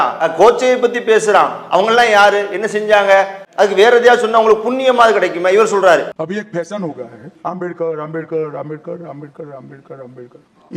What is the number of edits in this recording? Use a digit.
2